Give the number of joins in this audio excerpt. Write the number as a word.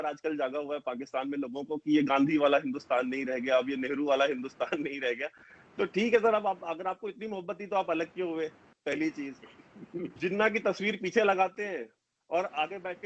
zero